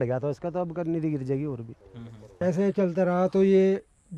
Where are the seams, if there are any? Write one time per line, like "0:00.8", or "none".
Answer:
0:02.2